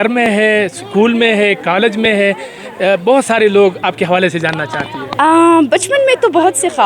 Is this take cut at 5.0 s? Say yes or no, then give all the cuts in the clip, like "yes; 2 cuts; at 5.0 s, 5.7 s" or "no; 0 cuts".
yes; 1 cut; at 5.0 s